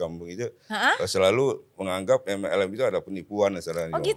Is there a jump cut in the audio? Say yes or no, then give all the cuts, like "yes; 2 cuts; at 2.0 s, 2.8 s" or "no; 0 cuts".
no; 0 cuts